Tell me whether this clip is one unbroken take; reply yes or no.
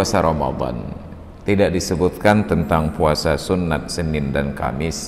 yes